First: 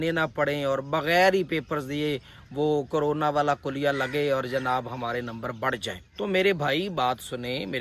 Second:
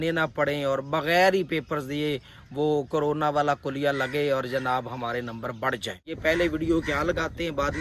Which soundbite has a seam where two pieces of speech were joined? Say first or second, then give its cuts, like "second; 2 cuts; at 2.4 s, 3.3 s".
second; 1 cut; at 6.2 s